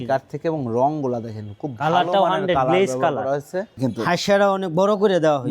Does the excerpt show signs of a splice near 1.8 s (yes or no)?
no